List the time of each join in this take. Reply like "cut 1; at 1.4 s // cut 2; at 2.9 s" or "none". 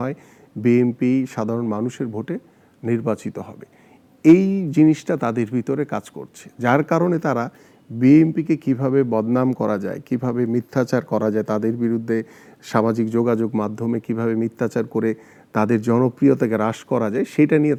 none